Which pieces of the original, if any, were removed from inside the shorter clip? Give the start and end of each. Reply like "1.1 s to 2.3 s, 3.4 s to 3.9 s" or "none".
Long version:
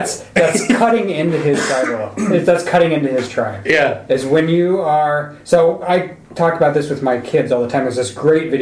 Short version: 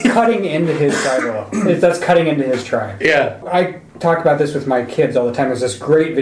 4.1 s to 5.8 s